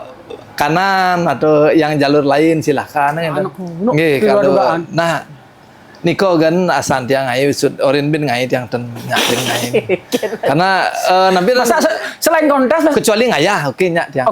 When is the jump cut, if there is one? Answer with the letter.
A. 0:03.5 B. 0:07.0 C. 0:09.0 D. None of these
A